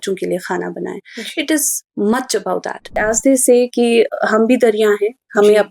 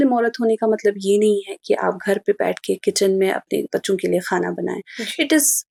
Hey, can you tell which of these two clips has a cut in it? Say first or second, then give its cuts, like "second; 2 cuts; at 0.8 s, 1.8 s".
first; 1 cut; at 3.0 s